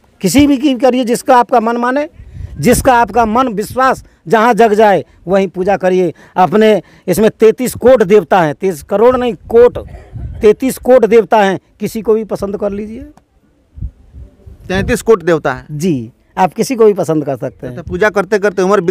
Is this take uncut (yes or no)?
yes